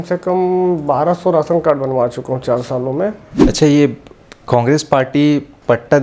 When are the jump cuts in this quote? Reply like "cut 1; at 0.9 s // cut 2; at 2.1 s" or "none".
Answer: cut 1; at 3.3 s